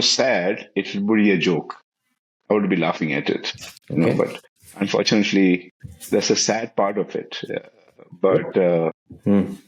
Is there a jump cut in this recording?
no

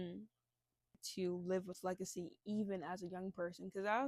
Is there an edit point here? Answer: yes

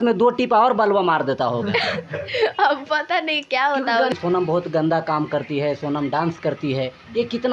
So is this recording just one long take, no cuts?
no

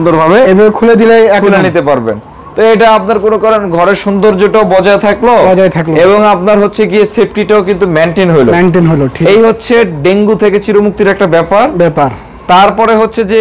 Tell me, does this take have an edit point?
no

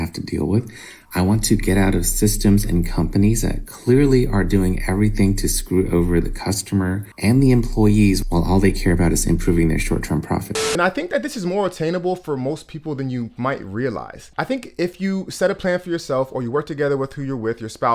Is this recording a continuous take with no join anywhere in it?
no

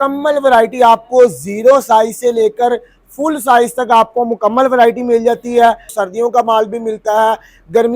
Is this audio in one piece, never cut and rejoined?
no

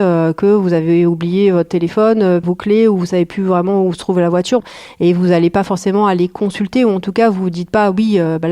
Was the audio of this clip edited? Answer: yes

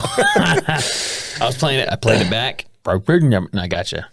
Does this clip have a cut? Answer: no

